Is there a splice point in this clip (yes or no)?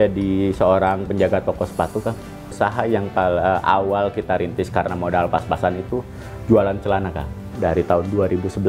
yes